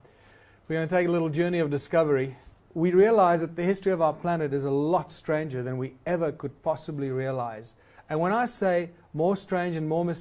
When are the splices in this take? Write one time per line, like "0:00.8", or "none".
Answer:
0:05.3